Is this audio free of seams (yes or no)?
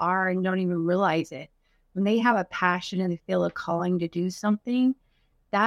yes